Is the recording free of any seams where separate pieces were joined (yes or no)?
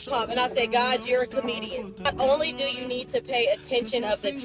no